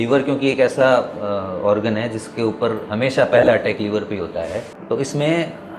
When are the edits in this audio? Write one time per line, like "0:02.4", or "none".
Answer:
0:04.7

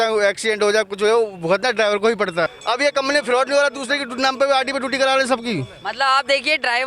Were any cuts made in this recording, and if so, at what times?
0:02.5

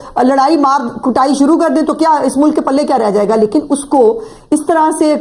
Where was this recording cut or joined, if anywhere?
none

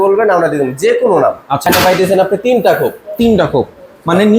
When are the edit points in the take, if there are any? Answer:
0:01.6

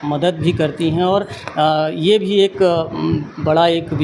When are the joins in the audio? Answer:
none

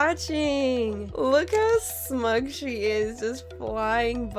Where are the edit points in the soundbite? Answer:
0:01.0

